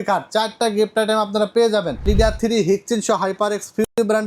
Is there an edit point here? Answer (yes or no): yes